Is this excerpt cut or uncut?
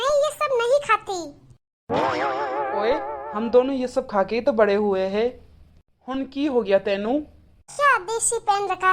cut